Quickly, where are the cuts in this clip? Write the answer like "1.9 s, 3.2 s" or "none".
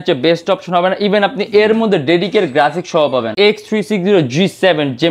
3.3 s